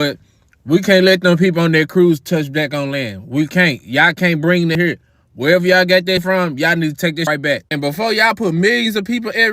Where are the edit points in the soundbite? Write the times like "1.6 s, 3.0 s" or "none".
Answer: 4.8 s, 6.2 s, 7.3 s